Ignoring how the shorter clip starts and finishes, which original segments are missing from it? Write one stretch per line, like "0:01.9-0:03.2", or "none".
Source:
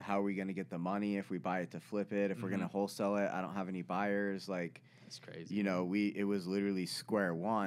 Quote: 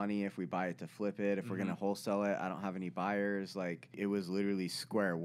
0:04.9-0:06.1